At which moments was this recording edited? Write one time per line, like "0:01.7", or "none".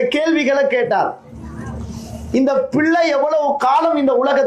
none